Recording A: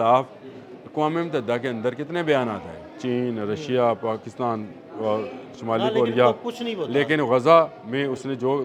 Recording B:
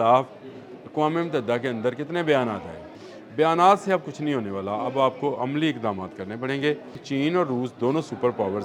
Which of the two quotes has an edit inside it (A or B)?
B